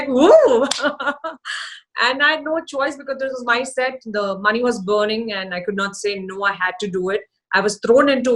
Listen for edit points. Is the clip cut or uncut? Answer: uncut